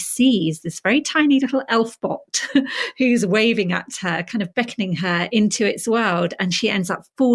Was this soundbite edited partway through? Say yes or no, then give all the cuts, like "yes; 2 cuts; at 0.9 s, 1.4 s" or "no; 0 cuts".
no; 0 cuts